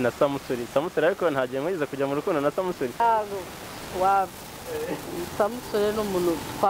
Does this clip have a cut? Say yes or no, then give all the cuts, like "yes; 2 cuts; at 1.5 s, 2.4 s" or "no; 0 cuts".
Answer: yes; 1 cut; at 3.0 s